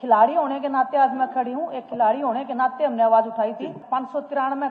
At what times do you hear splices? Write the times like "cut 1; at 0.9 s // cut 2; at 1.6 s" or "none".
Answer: cut 1; at 3.8 s